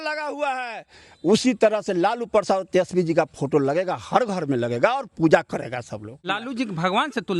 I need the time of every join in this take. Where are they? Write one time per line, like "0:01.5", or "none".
0:06.2